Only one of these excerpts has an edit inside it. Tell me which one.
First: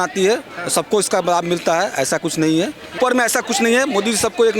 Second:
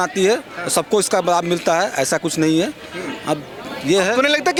first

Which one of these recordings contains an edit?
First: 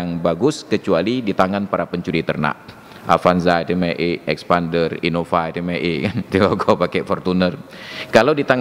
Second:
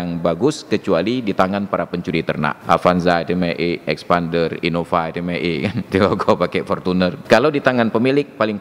second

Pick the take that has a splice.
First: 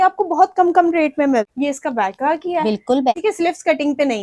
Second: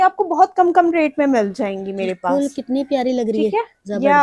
first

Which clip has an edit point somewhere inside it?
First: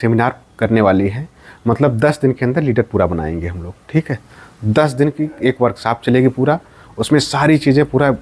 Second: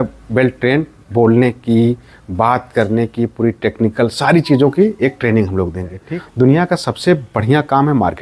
second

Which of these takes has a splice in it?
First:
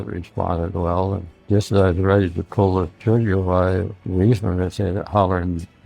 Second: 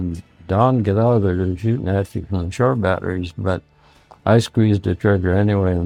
first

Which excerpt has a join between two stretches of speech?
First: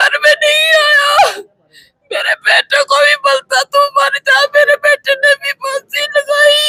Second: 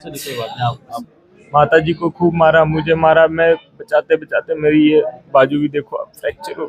second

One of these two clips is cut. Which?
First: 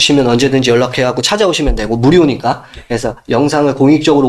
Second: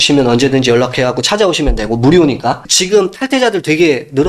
second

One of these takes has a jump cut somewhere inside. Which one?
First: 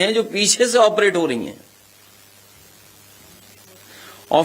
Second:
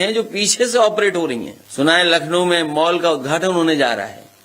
second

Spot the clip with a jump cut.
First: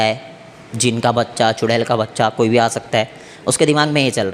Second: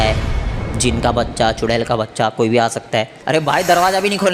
second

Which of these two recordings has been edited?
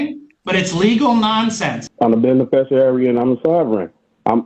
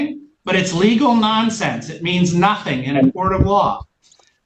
first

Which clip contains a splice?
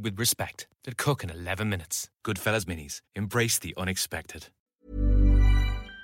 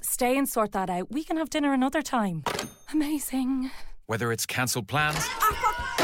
first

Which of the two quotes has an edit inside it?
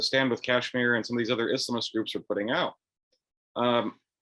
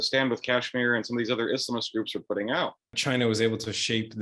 second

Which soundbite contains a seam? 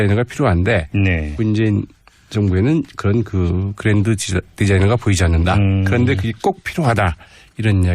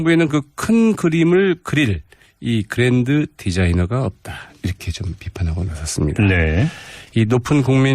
second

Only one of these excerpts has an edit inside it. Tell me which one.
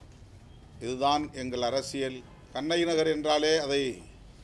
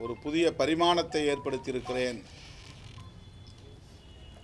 first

